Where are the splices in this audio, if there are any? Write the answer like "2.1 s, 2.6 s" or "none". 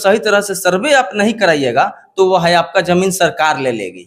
none